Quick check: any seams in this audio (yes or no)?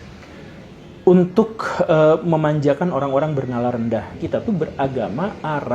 yes